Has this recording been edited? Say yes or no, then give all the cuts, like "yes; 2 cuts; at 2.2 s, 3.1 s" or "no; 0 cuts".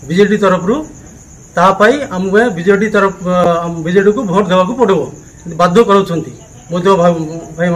no; 0 cuts